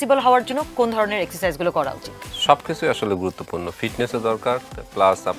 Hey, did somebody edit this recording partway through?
no; 0 cuts

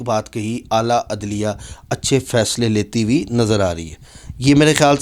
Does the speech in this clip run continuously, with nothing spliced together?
yes; 0 cuts

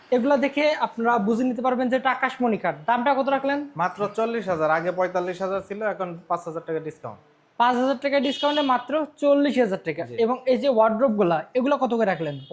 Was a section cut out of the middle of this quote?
no; 0 cuts

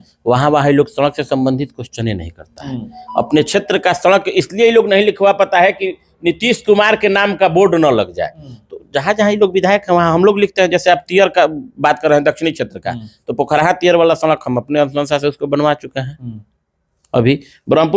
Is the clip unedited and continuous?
yes; 0 cuts

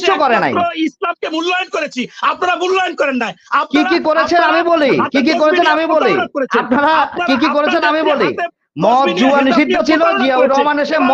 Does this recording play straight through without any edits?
yes; 0 cuts

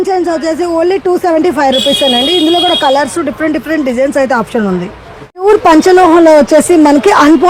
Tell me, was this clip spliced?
no; 0 cuts

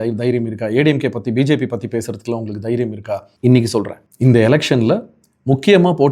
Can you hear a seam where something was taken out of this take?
yes; 2 cuts; at 3.3 s, 4.0 s

